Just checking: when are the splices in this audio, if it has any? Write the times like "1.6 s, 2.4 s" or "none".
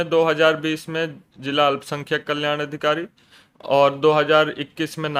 none